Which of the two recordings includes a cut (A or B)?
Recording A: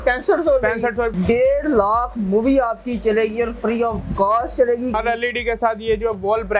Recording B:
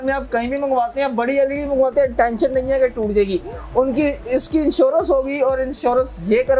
A